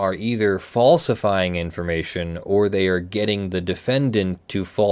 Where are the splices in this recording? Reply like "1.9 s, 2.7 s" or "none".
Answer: none

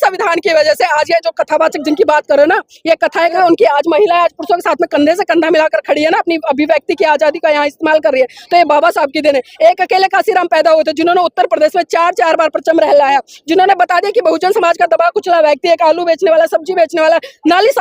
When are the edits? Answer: 3.3 s

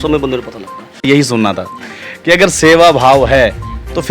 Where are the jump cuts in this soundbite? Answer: 1.0 s

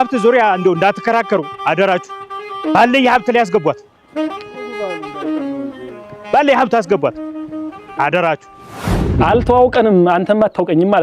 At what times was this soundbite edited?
9.0 s

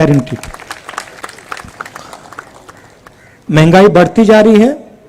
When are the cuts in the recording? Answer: none

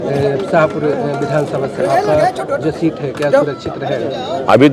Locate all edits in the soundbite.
none

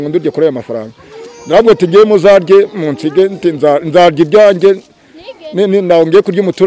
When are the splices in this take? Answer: none

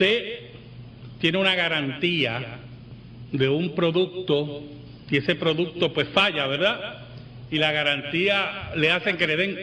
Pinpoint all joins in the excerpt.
none

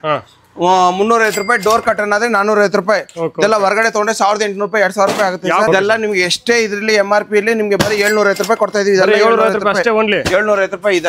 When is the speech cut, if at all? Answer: 5.7 s

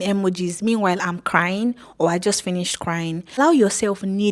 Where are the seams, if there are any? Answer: 3.4 s

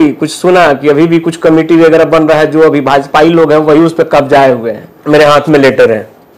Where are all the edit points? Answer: 4.9 s

